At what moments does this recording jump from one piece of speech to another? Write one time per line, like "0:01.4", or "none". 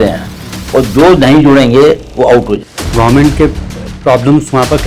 0:02.8